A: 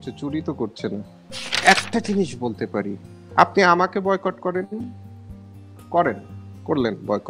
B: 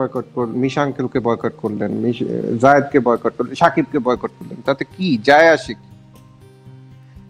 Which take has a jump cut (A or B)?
A